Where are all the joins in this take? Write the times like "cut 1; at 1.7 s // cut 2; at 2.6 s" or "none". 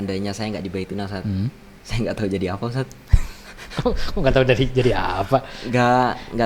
none